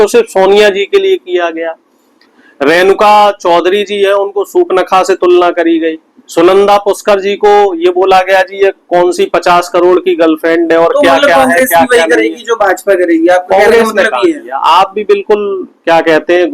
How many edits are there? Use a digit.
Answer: 0